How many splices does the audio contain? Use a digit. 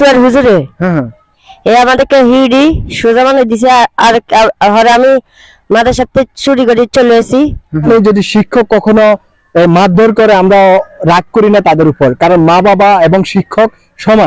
1